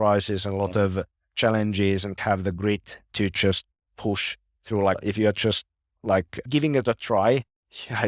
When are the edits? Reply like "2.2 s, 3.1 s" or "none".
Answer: 2.2 s, 5.0 s, 6.4 s